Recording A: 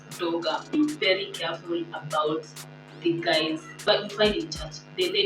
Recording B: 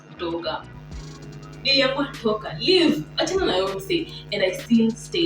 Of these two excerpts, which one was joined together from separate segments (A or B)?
A